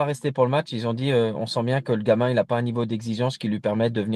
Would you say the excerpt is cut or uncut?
uncut